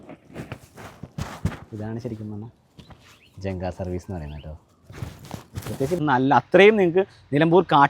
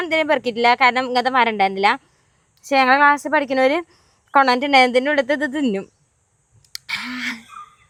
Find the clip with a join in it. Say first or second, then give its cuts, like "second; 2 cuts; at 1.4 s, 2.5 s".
first; 1 cut; at 5.9 s